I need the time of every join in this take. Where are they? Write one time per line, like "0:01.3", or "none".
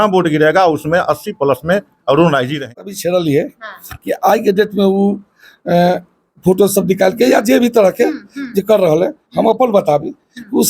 0:02.8